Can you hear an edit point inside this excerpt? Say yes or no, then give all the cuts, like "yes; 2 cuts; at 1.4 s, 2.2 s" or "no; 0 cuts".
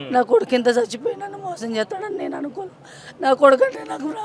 no; 0 cuts